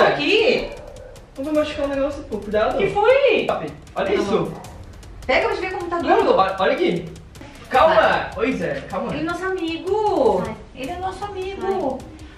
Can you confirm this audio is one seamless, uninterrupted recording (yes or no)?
no